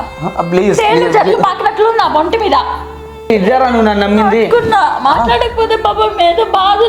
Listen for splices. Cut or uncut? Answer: cut